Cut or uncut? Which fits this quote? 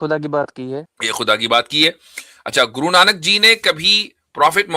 cut